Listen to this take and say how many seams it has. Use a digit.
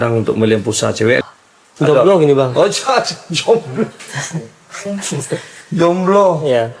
1